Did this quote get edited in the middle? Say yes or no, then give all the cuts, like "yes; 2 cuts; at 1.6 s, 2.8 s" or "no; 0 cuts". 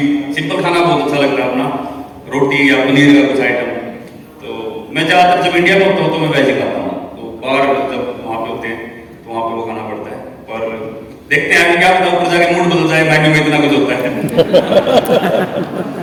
no; 0 cuts